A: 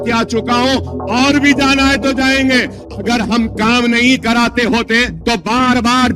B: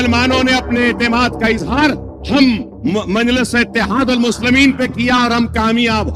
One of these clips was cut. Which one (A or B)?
A